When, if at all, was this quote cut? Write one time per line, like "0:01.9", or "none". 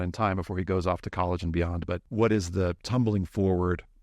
0:02.1
0:02.8